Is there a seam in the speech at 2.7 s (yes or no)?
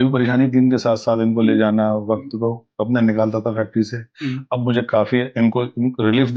no